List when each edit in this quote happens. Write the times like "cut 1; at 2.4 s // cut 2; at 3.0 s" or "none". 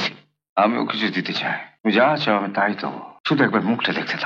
cut 1; at 1.7 s // cut 2; at 3.1 s